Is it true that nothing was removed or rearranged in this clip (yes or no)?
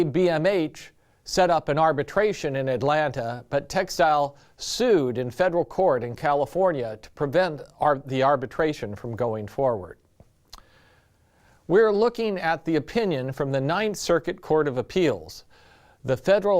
no